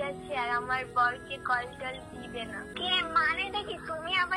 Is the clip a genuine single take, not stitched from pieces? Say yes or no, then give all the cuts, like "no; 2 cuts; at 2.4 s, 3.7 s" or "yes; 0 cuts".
no; 1 cut; at 2.7 s